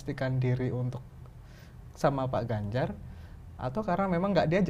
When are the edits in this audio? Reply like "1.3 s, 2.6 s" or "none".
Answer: none